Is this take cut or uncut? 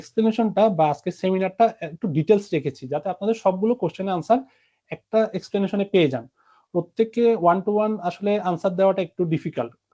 uncut